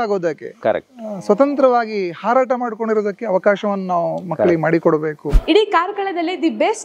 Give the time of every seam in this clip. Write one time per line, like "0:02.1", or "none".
0:05.3